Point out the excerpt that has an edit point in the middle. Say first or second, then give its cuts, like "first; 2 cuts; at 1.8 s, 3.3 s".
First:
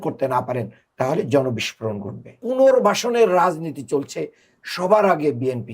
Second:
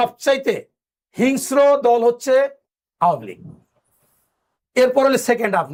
first; 1 cut; at 2.4 s